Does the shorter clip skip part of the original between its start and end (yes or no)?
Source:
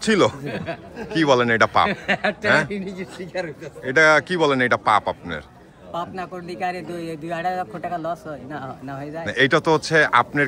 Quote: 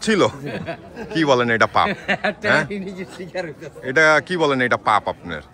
no